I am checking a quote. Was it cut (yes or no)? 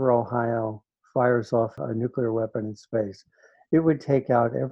yes